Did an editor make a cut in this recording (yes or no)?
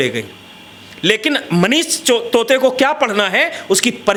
no